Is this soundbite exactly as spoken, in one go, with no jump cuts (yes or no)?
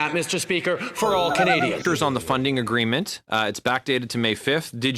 no